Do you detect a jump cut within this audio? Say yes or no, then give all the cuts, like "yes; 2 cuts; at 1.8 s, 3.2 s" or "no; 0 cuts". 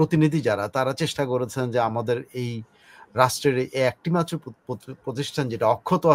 no; 0 cuts